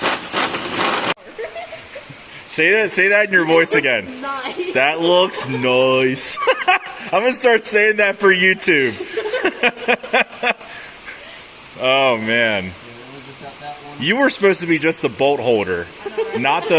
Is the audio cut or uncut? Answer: cut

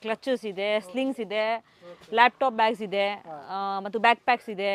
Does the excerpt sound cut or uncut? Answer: uncut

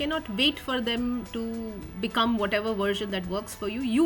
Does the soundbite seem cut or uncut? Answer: uncut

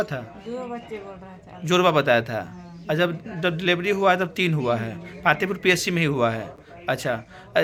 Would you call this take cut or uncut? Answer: uncut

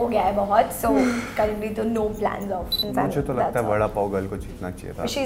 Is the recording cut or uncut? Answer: cut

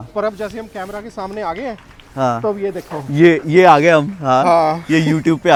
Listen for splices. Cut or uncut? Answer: uncut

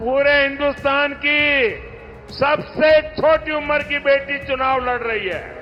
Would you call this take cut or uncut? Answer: uncut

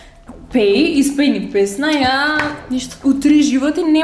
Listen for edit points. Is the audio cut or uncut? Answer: uncut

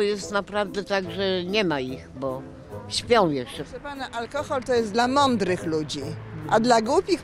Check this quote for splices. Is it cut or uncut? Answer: cut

